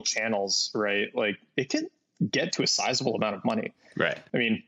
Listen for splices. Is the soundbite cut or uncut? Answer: uncut